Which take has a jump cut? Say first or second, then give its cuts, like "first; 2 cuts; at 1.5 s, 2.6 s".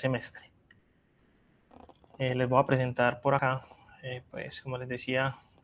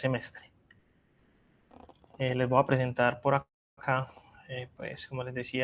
first; 1 cut; at 3.4 s